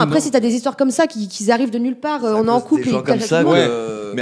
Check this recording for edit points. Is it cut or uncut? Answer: uncut